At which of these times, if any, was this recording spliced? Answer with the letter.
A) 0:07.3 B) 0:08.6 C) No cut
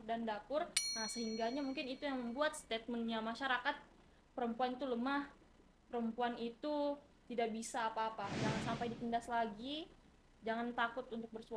B